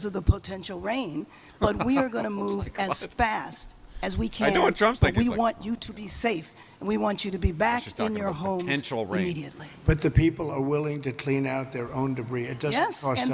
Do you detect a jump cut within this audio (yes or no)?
no